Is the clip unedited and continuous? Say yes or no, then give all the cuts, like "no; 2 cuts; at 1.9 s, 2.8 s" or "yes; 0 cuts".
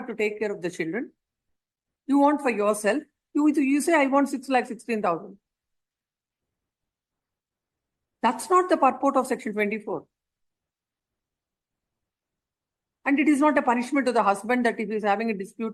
yes; 0 cuts